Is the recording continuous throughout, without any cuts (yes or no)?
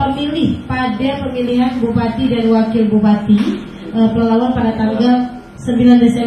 yes